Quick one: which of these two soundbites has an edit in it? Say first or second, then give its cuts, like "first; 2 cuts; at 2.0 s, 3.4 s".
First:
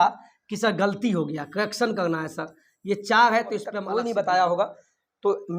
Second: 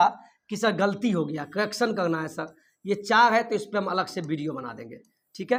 first; 1 cut; at 3.8 s